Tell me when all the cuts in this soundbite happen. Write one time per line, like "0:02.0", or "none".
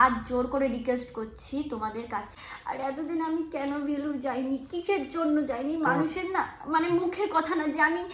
0:02.3